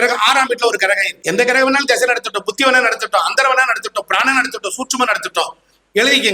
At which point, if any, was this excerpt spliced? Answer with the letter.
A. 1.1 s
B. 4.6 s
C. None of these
A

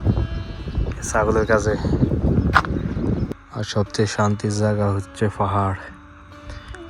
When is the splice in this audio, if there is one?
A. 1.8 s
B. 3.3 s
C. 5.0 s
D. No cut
B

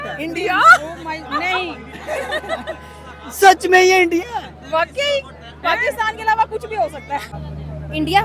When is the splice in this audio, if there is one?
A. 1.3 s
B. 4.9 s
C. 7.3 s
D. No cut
C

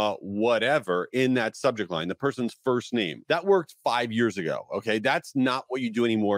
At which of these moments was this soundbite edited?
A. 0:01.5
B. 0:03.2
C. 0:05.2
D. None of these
B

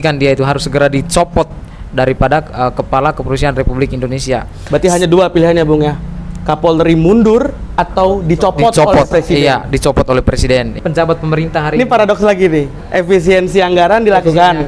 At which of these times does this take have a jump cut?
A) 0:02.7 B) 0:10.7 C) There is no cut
B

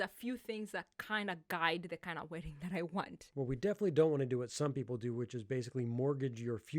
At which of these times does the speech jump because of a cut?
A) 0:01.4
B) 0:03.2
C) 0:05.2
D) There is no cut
B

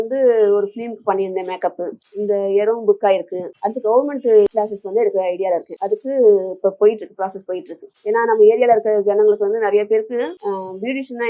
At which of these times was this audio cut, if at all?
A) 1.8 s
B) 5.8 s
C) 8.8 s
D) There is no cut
D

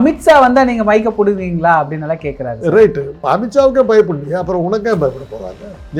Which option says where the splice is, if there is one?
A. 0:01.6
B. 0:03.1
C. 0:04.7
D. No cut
B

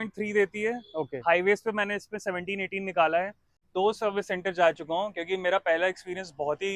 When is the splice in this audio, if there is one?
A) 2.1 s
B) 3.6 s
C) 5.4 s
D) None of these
B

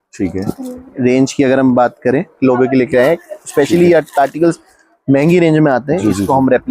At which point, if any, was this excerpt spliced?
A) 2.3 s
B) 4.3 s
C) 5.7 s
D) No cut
A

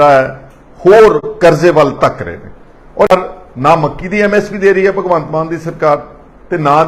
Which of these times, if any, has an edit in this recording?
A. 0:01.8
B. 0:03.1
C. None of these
B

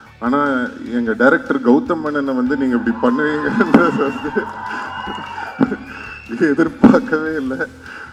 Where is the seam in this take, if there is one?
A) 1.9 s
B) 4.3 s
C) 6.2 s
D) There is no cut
D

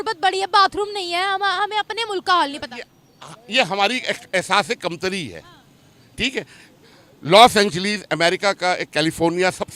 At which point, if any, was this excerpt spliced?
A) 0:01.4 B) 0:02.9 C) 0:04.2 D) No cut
D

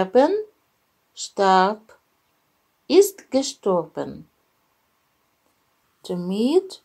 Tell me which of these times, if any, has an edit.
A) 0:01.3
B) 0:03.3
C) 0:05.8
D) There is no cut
C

